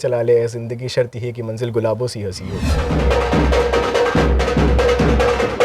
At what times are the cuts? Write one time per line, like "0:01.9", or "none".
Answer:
0:02.8